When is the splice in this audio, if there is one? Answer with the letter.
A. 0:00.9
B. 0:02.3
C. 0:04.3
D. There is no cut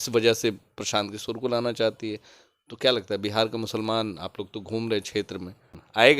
D